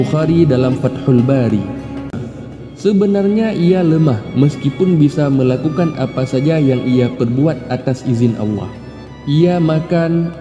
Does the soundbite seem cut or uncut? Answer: cut